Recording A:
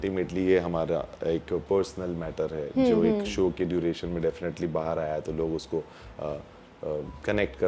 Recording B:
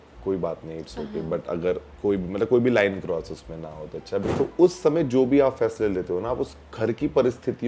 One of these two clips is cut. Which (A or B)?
B